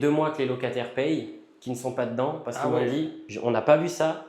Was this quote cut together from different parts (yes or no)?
yes